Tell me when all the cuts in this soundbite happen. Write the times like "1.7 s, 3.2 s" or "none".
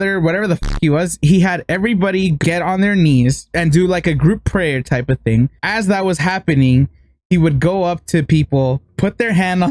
2.4 s, 3.6 s, 5.6 s